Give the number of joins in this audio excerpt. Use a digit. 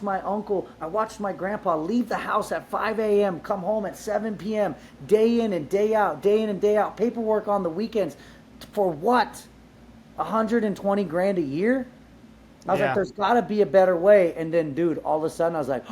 0